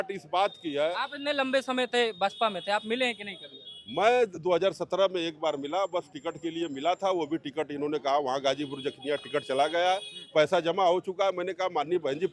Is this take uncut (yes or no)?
yes